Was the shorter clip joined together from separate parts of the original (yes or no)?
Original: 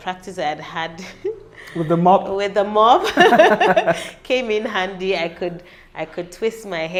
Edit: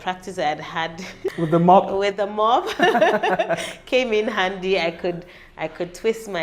yes